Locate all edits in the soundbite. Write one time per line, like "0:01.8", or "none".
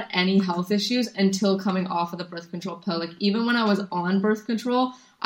none